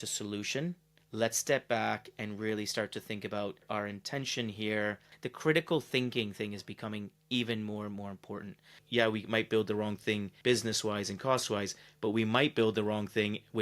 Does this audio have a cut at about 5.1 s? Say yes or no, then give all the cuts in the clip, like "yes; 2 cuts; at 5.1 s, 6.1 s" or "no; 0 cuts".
yes; 5 cuts; at 0.9 s, 3.6 s, 5.1 s, 8.8 s, 10.3 s